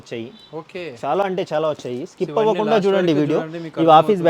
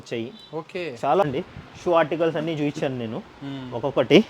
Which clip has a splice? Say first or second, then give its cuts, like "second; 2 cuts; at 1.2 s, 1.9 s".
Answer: second; 1 cut; at 1.2 s